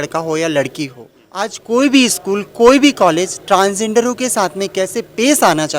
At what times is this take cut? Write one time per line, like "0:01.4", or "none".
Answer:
0:01.5